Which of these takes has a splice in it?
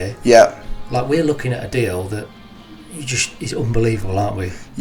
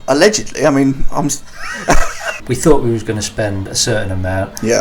second; 1 cut; at 2.2 s

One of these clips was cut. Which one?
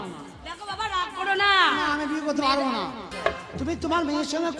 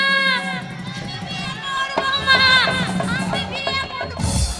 first; 1 cut; at 3.1 s

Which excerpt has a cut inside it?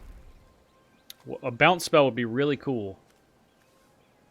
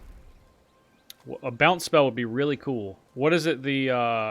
second; 1 cut; at 3.0 s

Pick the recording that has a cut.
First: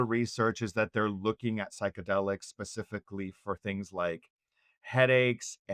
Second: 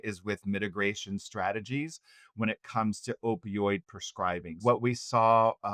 second; 1 cut; at 4.5 s

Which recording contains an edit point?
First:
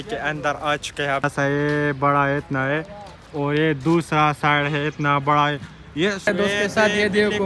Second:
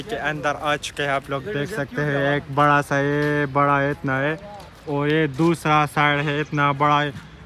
first; 2 cuts; at 1.2 s, 6.2 s

